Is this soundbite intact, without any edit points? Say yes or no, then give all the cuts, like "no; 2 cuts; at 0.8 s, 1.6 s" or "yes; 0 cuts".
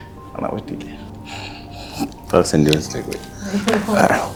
yes; 0 cuts